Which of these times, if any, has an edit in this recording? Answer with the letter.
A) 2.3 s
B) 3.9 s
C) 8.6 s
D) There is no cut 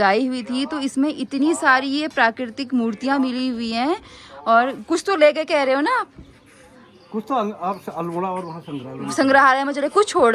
D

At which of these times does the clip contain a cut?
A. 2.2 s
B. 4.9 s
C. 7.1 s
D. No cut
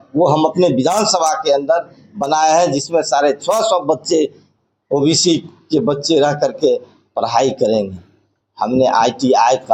D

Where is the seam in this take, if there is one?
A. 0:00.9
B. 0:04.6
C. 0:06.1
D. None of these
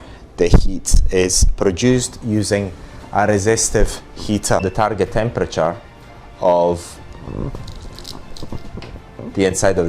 B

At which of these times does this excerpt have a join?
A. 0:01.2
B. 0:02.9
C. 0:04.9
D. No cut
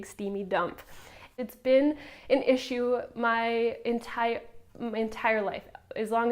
A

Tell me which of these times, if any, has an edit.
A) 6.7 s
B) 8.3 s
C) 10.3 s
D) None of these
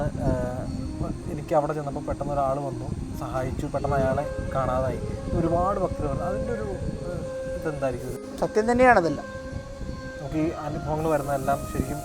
B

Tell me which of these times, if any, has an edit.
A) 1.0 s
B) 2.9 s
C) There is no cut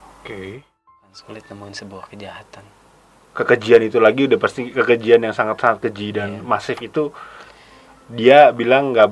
A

